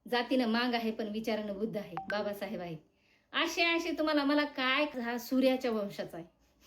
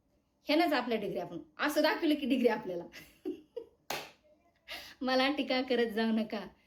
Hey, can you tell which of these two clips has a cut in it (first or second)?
first